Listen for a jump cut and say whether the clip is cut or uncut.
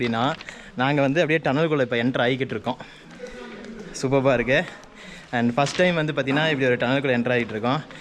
uncut